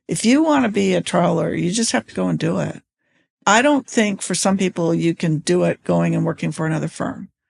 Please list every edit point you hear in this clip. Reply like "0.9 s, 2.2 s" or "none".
3.4 s